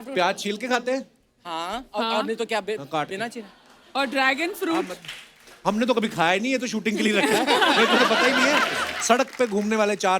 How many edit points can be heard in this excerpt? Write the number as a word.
one